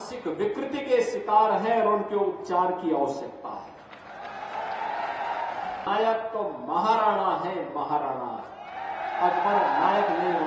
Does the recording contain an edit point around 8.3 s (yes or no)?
no